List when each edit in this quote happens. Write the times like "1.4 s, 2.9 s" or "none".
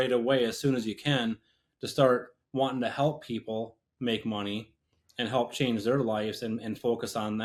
none